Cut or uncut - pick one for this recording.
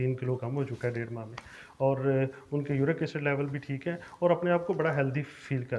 uncut